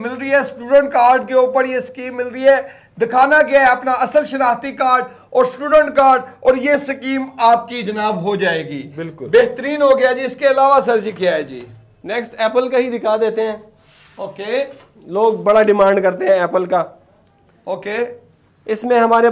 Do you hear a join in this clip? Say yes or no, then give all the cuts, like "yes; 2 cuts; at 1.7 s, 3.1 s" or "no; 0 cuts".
no; 0 cuts